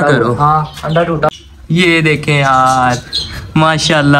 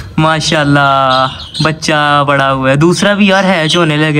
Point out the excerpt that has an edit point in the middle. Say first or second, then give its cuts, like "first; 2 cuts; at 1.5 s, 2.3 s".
first; 1 cut; at 1.3 s